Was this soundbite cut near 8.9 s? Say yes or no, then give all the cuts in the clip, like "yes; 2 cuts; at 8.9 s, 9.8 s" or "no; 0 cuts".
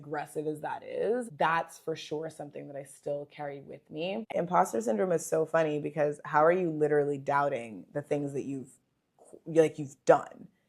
no; 1 cut; at 4.3 s